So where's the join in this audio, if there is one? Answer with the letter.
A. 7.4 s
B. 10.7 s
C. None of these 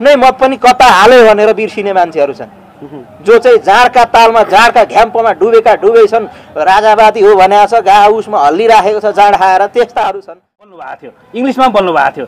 B